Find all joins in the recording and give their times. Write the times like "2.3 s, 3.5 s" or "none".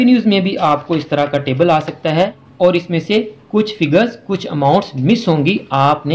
2.4 s